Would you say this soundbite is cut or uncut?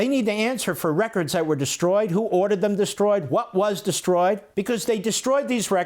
cut